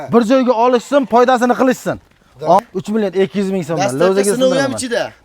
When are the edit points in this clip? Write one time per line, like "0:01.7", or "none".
0:02.6